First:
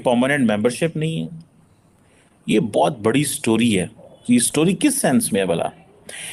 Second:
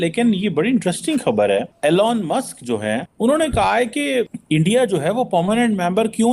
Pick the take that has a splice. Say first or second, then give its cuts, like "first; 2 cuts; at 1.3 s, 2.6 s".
second; 3 cuts; at 1.7 s, 3.1 s, 4.4 s